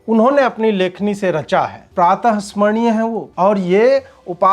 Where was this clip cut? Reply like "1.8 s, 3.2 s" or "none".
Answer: 1.8 s, 3.2 s